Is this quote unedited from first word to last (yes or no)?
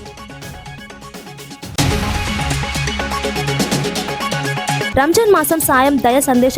yes